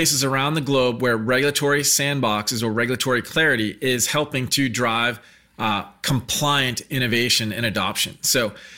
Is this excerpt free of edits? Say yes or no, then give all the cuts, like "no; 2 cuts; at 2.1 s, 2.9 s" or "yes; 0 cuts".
yes; 0 cuts